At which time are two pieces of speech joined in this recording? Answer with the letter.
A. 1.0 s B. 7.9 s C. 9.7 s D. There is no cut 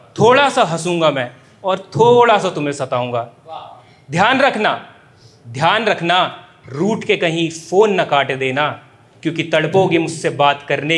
D